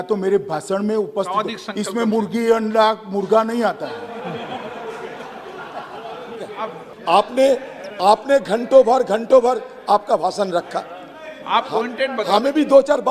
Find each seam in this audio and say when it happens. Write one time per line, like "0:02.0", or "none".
0:06.9